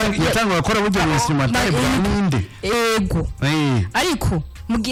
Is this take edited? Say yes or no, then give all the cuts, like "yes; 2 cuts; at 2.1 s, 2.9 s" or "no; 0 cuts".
no; 0 cuts